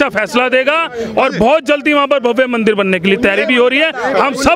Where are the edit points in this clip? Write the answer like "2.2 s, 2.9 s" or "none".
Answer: none